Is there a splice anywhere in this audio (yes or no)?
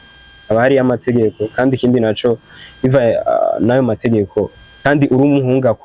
yes